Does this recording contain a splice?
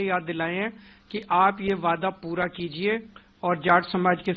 no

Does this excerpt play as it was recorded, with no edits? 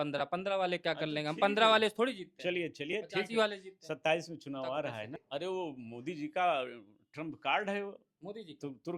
no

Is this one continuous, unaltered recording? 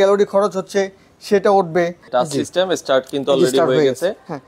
no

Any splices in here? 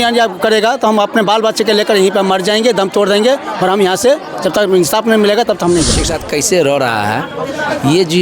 yes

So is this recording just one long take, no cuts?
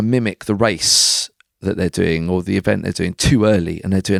yes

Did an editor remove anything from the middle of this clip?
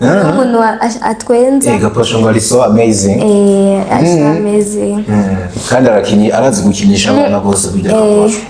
no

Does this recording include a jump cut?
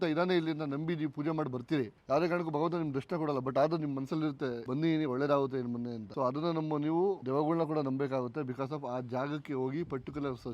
yes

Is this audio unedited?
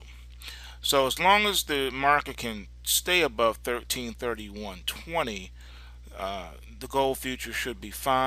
no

